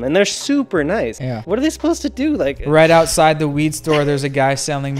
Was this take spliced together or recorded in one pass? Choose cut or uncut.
cut